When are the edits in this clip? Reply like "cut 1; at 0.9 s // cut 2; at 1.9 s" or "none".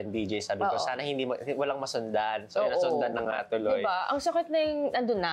none